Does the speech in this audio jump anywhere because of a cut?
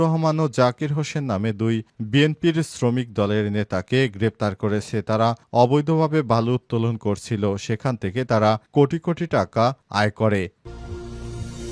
yes; 1 cut; at 10.7 s

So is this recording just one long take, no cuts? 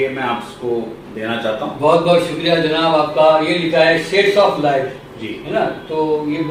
yes; 0 cuts

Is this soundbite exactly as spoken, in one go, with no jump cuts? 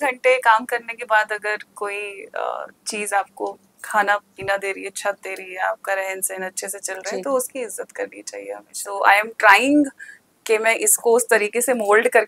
no; 1 cut; at 8.8 s

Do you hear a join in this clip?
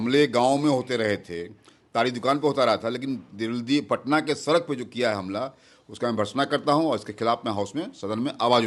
no; 0 cuts

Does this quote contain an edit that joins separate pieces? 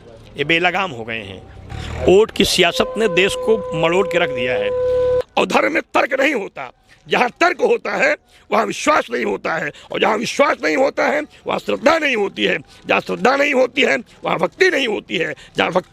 yes; 2 cuts; at 1.7 s, 5.2 s

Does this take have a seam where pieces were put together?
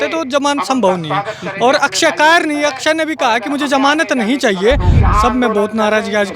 yes; 1 cut; at 5.0 s

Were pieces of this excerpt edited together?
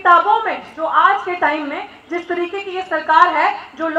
no; 0 cuts

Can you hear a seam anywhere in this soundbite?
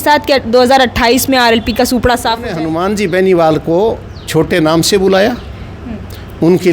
yes; 1 cut; at 2.6 s

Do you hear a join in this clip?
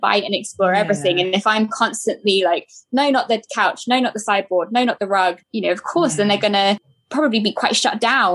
yes; 2 cuts; at 5.4 s, 7.0 s

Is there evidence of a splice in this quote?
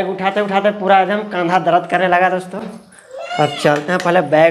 no; 0 cuts

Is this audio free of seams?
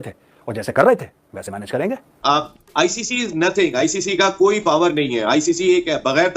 no; 1 cut; at 2.1 s

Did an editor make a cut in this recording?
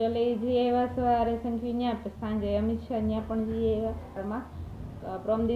yes; 1 cut; at 4.2 s

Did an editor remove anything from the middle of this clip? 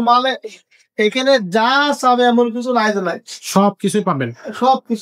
no; 0 cuts

